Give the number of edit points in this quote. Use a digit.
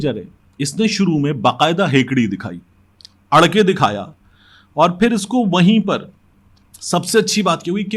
0